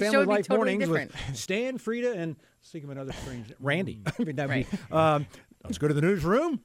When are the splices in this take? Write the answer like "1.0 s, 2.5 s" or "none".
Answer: 5.4 s